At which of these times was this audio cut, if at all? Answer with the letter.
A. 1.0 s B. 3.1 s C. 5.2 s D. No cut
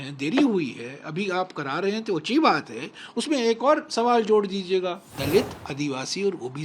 C